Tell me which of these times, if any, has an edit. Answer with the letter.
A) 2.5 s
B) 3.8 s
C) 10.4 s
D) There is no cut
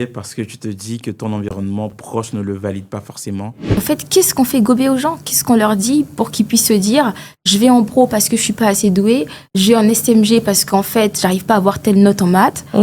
B